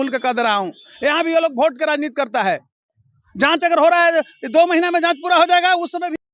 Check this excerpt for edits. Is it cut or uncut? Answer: uncut